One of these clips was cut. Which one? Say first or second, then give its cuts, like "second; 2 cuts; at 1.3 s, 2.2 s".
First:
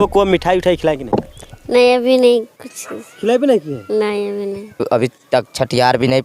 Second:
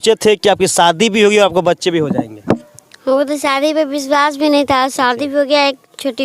first; 1 cut; at 4.8 s